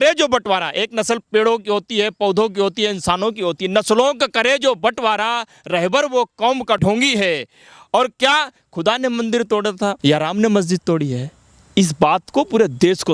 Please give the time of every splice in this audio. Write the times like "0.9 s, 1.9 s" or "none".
6.8 s, 10.0 s